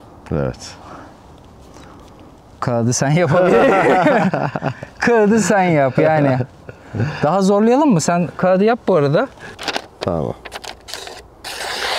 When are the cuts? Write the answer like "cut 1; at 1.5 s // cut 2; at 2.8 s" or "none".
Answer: cut 1; at 9.5 s